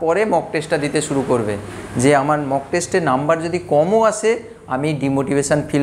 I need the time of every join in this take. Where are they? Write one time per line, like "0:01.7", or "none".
none

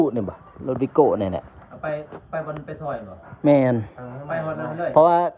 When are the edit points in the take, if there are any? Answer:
none

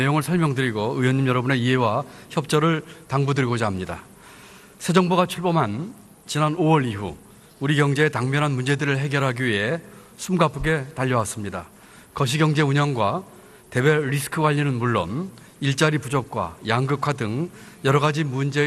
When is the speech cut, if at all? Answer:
0:15.0

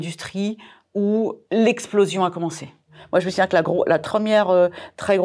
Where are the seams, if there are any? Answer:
0:01.4
0:03.0
0:04.0

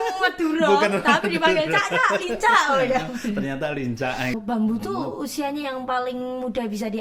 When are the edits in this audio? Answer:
0:04.3

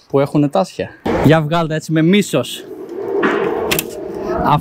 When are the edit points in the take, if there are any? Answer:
0:01.1

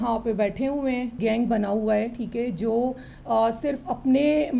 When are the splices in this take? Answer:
0:01.2

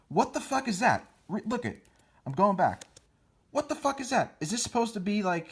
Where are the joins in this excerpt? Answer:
0:04.3

